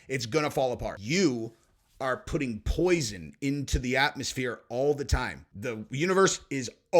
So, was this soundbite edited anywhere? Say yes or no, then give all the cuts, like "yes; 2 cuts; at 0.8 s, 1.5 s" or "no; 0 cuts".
yes; 2 cuts; at 1.0 s, 5.5 s